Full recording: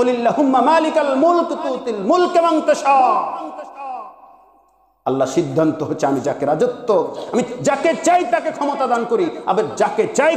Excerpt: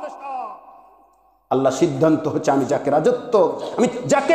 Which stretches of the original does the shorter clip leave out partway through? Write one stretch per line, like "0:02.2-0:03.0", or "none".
none